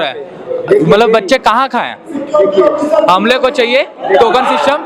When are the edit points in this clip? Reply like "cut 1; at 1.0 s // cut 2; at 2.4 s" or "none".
none

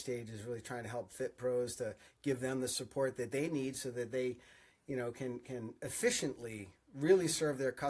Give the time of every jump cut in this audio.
none

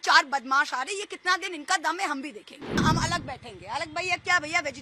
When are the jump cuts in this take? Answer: cut 1; at 2.8 s

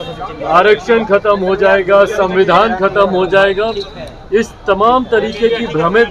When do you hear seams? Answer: none

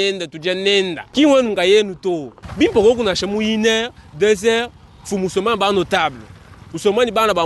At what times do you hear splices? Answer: cut 1; at 1.0 s // cut 2; at 2.3 s

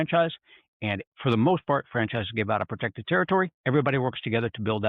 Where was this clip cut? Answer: cut 1; at 1.0 s // cut 2; at 3.6 s

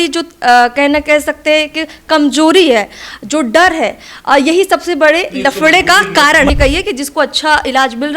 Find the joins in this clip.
cut 1; at 6.5 s

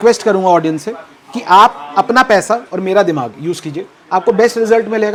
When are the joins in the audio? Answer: none

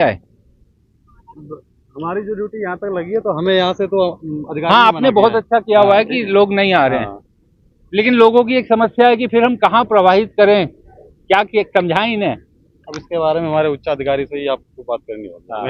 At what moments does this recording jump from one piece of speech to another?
none

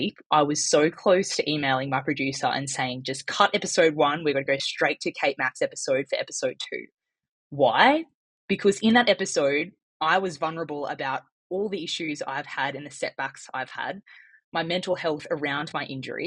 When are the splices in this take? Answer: none

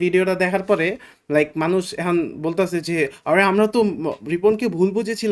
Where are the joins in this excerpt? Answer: none

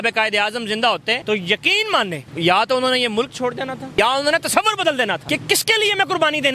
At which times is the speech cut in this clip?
cut 1; at 1.2 s // cut 2; at 2.3 s // cut 3; at 3.9 s // cut 4; at 5.2 s

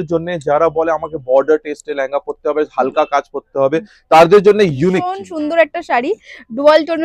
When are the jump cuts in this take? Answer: cut 1; at 5.2 s

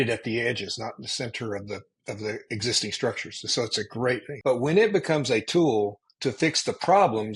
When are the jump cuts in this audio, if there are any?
cut 1; at 4.3 s

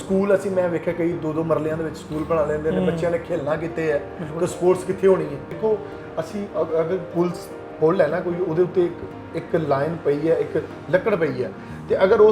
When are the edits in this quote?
cut 1; at 5.5 s

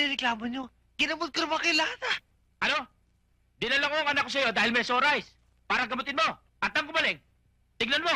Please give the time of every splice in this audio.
cut 1; at 6.5 s

